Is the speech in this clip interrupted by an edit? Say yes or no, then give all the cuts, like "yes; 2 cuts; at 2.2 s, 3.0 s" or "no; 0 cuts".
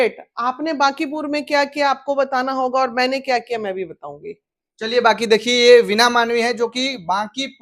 no; 0 cuts